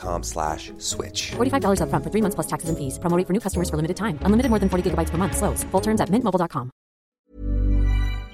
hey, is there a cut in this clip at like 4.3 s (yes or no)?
no